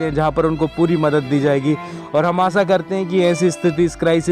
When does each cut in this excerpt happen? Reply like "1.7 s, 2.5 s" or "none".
none

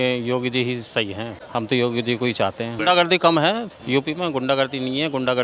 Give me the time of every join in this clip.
1.4 s, 2.8 s, 3.7 s

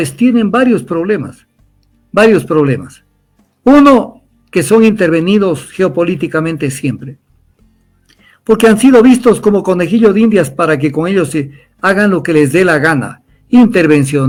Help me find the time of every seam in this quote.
none

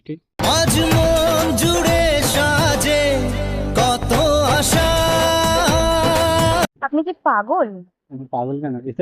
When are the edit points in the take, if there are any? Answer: none

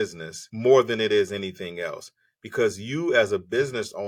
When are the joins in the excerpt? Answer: none

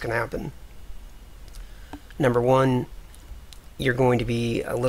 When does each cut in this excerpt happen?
none

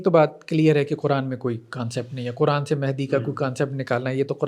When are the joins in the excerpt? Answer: none

